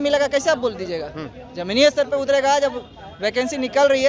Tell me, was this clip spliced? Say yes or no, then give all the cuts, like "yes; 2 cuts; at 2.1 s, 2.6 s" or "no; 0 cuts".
no; 0 cuts